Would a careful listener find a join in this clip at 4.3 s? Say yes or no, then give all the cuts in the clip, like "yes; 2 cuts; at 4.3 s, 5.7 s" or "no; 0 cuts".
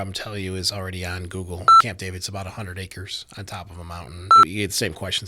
yes; 2 cuts; at 1.8 s, 4.3 s